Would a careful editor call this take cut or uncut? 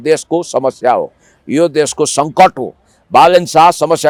uncut